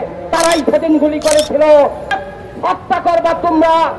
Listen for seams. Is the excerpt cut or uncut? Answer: cut